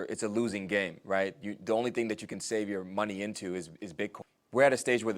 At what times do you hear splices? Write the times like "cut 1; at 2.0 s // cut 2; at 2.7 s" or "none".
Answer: cut 1; at 4.3 s